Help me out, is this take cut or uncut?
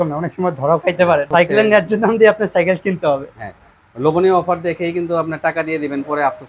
cut